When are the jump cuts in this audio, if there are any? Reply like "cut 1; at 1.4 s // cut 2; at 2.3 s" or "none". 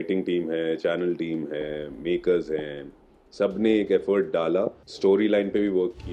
cut 1; at 4.9 s